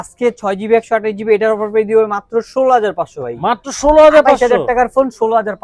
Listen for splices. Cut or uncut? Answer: uncut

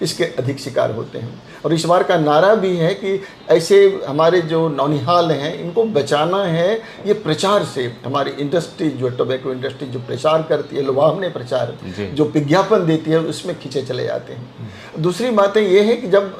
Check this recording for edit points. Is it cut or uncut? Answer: uncut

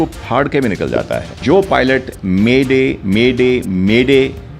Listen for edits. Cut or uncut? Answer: cut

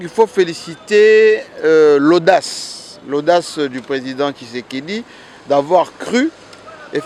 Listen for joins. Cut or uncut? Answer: uncut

